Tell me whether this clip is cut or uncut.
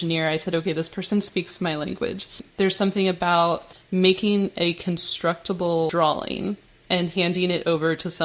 cut